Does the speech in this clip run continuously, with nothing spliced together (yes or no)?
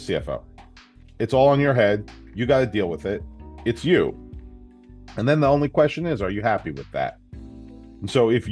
yes